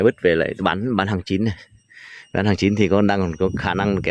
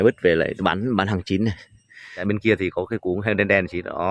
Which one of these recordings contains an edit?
second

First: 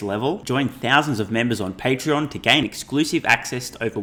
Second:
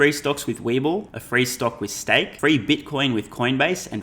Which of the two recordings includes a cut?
second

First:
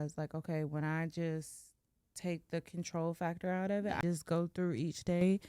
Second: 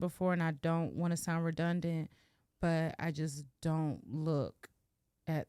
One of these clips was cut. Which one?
first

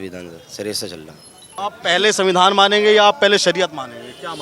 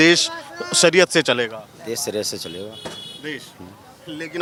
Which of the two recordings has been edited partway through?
first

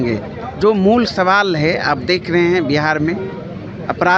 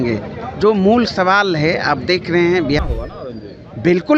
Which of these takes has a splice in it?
second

